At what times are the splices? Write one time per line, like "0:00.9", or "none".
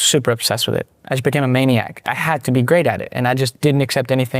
0:02.1